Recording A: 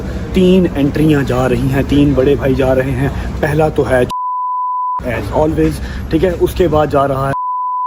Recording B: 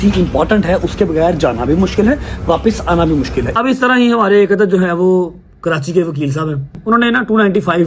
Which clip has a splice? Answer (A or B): B